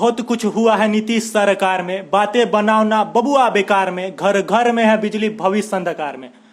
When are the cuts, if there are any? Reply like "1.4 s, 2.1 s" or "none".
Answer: none

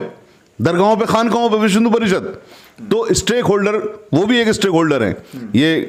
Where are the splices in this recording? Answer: none

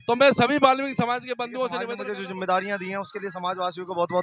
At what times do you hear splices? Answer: 1.9 s

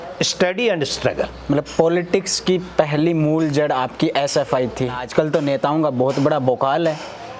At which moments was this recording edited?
5.0 s

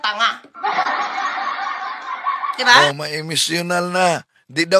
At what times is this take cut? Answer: none

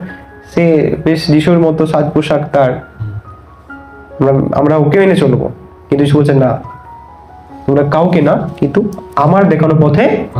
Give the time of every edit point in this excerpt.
none

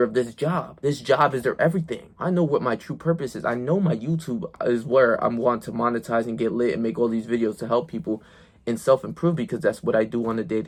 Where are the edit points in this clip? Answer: none

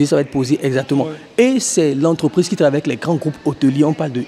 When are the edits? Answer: none

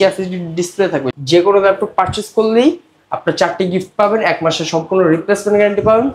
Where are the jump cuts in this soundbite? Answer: 1.1 s

